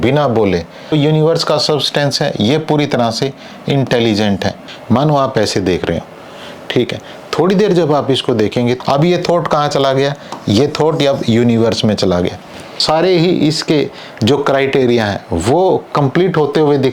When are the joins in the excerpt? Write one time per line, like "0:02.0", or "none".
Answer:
0:00.9
0:04.7
0:08.8
0:12.8